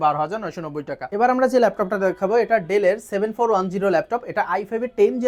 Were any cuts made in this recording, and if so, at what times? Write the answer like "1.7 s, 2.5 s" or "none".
none